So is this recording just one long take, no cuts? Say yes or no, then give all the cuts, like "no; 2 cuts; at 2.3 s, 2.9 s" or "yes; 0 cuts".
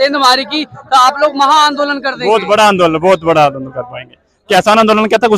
yes; 0 cuts